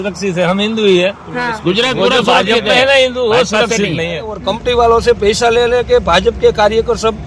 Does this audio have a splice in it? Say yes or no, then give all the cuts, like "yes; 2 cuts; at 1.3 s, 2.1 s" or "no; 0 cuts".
yes; 1 cut; at 4.4 s